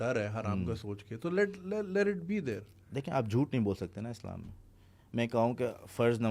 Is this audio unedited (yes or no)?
yes